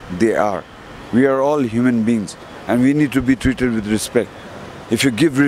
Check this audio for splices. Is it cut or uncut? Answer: uncut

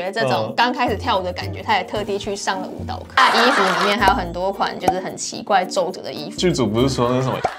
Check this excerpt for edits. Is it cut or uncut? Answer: cut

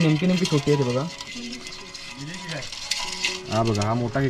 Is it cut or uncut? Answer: cut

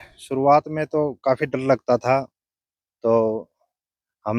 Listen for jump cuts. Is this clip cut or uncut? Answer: uncut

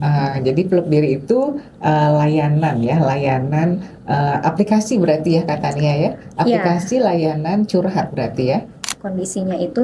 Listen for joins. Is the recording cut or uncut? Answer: cut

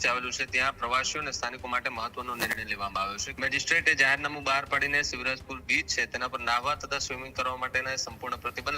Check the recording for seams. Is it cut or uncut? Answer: cut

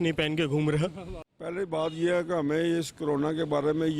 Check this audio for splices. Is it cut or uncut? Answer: cut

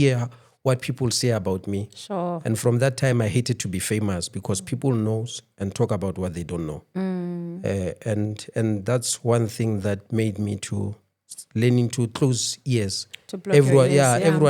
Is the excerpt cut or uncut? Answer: uncut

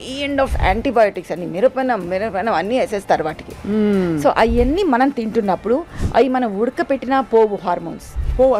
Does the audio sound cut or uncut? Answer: uncut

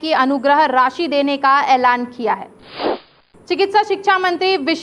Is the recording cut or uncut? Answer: cut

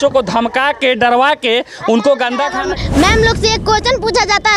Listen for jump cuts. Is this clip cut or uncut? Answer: cut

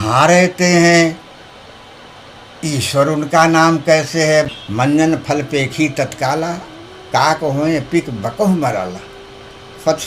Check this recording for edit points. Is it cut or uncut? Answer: cut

